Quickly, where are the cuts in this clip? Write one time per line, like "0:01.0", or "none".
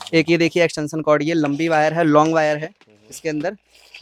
none